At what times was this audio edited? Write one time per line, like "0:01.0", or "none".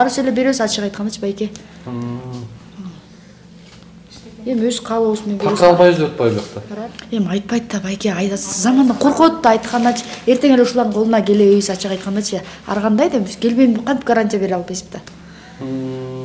none